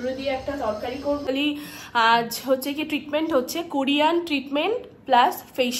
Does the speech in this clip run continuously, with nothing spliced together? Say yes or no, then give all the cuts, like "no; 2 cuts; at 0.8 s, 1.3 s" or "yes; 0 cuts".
no; 1 cut; at 1.3 s